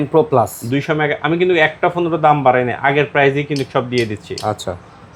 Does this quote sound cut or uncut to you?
uncut